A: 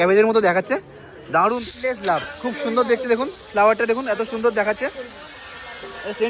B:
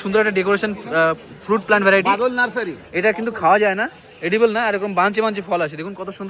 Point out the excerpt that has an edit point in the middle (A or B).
A